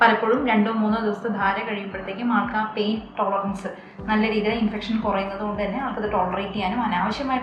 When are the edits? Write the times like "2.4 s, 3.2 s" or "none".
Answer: none